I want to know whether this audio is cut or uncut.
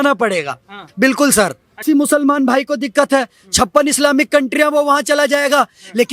cut